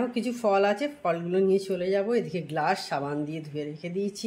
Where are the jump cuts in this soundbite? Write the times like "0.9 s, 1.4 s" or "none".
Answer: none